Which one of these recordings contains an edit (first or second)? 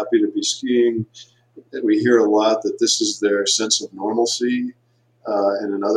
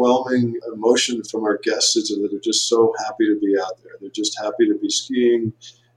second